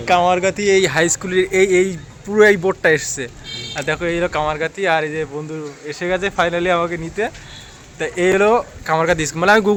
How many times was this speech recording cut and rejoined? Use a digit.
0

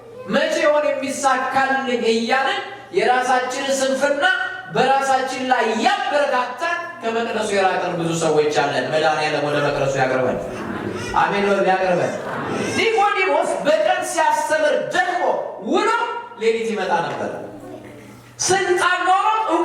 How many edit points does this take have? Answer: 0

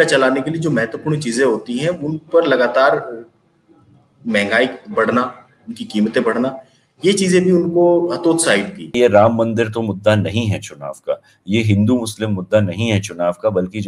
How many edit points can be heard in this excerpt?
1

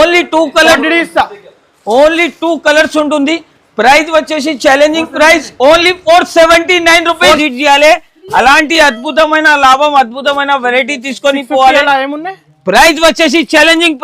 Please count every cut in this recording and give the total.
1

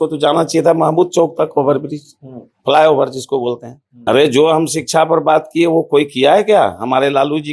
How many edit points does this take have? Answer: 1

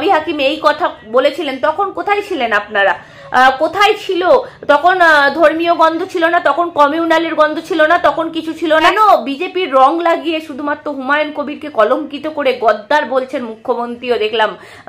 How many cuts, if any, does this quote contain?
1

